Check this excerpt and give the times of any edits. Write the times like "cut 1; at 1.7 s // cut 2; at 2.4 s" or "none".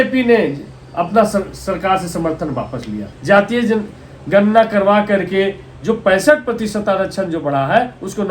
cut 1; at 3.1 s